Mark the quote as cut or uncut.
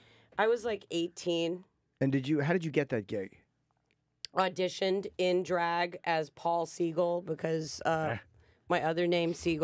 cut